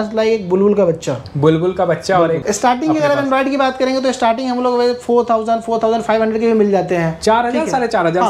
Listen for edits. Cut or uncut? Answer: cut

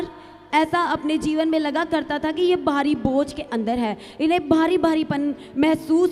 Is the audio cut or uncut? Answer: uncut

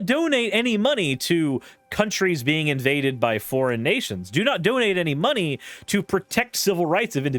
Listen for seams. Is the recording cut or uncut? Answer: uncut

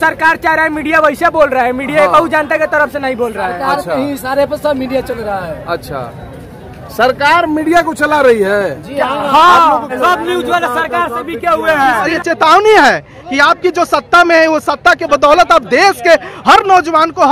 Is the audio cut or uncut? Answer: cut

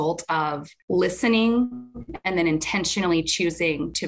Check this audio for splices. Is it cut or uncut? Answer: uncut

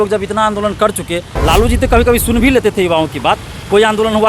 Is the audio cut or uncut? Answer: cut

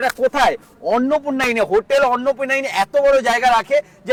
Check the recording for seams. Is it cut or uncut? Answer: uncut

